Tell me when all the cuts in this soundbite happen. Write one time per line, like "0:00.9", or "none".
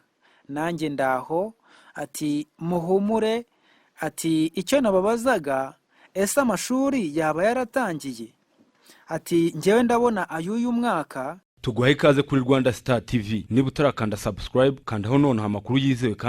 0:11.4